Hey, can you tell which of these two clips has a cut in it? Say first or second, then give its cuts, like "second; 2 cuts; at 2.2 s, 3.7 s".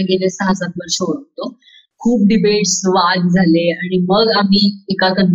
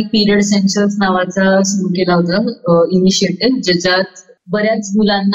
first; 1 cut; at 1.8 s